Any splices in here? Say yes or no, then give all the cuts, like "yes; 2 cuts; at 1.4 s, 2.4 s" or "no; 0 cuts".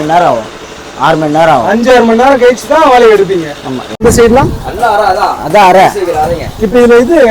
yes; 1 cut; at 4.0 s